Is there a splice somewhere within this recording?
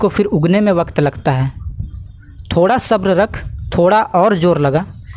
no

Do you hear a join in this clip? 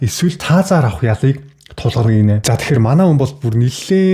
yes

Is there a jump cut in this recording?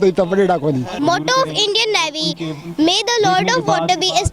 yes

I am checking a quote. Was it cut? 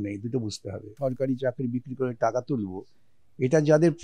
yes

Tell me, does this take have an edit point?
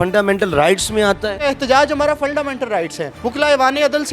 yes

